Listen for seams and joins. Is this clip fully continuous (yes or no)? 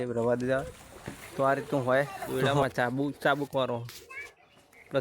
no